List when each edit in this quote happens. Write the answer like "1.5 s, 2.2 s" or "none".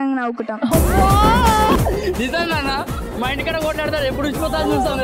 1.8 s